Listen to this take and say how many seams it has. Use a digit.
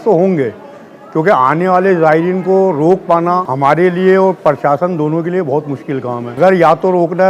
2